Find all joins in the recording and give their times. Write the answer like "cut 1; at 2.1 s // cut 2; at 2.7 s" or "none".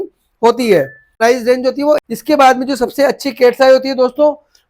cut 1; at 1.0 s // cut 2; at 2.0 s